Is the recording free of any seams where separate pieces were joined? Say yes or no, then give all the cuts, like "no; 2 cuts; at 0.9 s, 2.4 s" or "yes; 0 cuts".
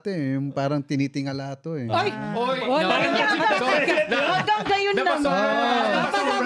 yes; 0 cuts